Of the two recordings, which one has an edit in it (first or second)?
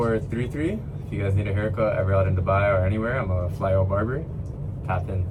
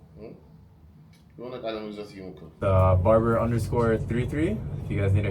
second